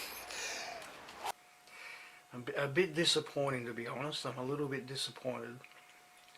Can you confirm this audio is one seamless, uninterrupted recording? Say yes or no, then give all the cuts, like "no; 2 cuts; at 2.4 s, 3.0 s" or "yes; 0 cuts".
no; 1 cut; at 1.3 s